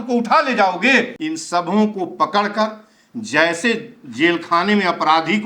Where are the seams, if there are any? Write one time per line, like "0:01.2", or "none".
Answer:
0:01.2